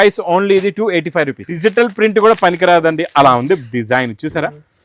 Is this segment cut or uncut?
cut